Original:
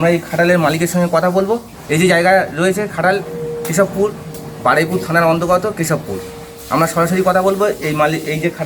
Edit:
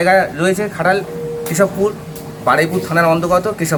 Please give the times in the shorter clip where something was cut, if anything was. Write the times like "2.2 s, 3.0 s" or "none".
none